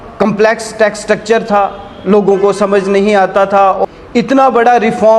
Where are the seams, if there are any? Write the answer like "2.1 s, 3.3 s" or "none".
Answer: 3.8 s